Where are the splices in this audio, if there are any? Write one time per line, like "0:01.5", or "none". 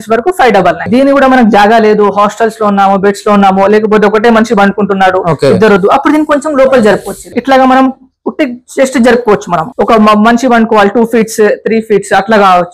0:00.9
0:07.3
0:09.7